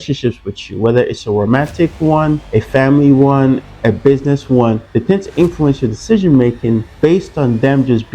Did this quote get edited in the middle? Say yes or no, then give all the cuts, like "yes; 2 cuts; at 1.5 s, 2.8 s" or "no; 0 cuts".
yes; 4 cuts; at 2.4 s, 3.7 s, 4.8 s, 6.9 s